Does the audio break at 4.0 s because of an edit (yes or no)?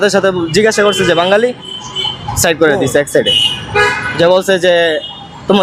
no